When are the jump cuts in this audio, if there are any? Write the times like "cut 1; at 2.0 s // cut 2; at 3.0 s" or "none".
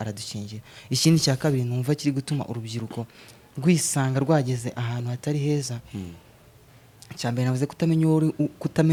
none